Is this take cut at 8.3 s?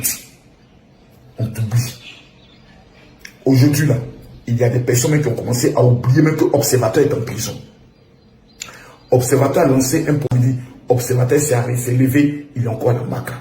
no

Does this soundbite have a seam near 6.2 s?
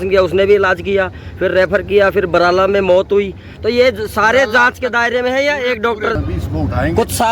yes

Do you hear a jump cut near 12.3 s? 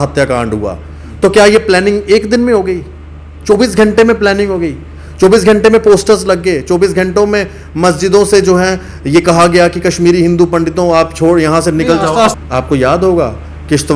yes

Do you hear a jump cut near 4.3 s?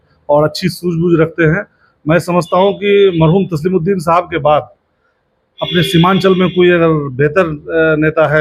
no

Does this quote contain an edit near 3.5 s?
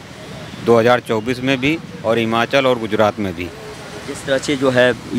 no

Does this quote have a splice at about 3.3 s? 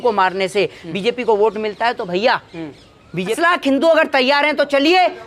yes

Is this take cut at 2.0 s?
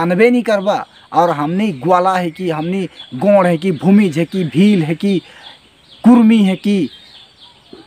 no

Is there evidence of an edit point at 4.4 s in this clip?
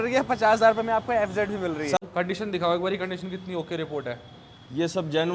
no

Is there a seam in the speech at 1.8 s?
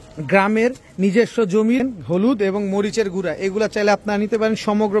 yes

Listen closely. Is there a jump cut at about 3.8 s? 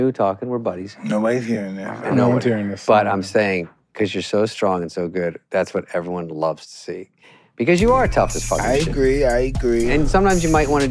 no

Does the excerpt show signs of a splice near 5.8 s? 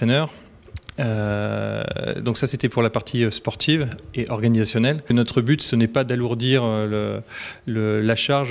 yes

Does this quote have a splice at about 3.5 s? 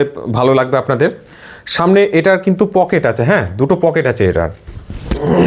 no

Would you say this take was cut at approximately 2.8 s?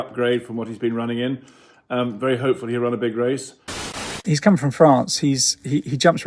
no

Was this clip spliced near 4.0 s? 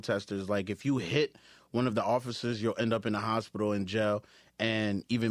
no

